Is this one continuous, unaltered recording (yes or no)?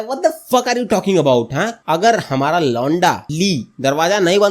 no